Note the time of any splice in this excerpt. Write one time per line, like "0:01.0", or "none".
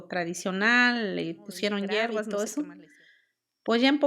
0:02.3